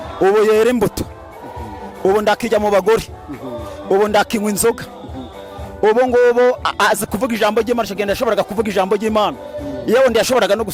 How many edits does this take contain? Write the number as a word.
zero